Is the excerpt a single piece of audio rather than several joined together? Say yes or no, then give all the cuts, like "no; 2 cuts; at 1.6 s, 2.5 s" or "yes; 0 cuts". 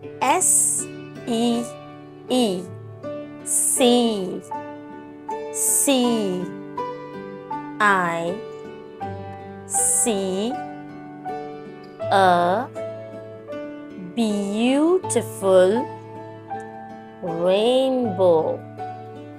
no; 5 cuts; at 8.9 s, 10.0 s, 16.0 s, 17.2 s, 18.6 s